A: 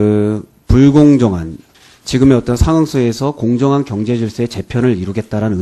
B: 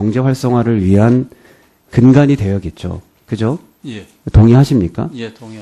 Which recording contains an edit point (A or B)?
A